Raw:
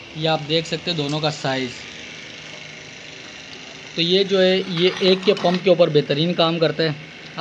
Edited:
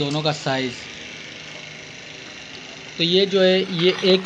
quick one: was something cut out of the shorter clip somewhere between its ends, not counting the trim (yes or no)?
no